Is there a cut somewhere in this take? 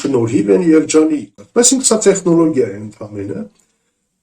yes; 1 cut; at 1.3 s

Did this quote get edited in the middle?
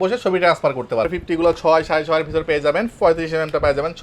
yes; 1 cut; at 1.1 s

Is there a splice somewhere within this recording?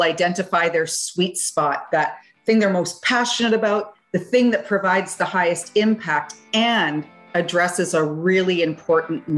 no; 0 cuts

